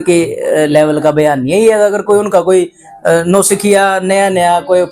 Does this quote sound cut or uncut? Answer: uncut